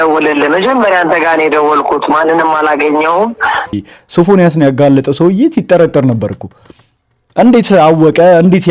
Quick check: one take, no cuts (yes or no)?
no